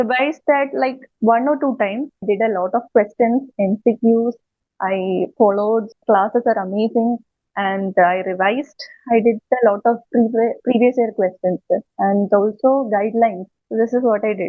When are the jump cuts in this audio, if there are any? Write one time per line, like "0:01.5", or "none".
0:02.2
0:06.0
0:13.5